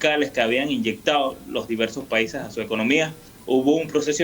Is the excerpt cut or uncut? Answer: cut